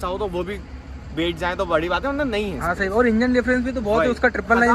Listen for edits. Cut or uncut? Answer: uncut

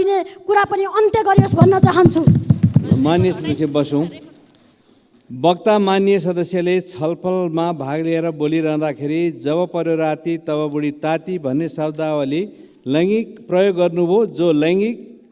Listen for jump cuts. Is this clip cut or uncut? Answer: uncut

